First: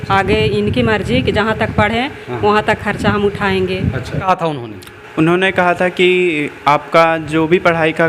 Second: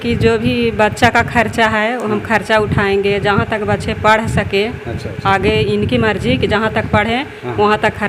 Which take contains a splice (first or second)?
first